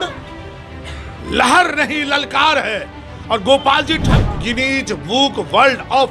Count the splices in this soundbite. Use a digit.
1